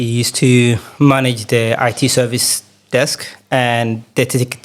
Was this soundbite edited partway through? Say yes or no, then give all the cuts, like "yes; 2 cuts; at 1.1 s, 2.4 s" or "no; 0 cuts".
no; 0 cuts